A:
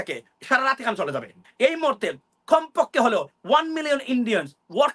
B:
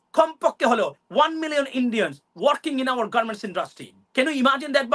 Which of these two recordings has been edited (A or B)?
A